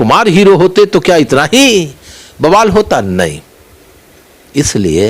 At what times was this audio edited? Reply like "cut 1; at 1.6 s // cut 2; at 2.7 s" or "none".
none